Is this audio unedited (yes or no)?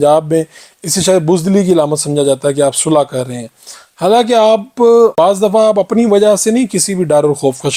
yes